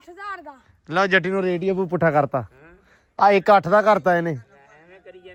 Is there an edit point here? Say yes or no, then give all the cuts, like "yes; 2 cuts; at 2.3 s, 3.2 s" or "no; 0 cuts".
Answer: no; 0 cuts